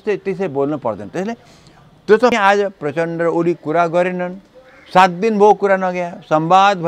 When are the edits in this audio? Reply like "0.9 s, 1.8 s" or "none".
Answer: 2.3 s